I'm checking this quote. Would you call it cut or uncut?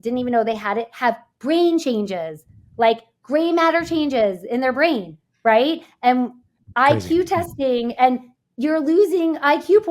uncut